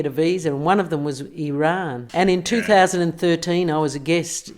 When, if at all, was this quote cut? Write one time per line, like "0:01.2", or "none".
0:02.0